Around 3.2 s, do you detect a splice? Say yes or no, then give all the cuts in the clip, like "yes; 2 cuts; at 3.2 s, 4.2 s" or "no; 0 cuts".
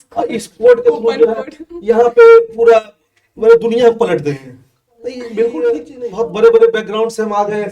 no; 1 cut; at 6.0 s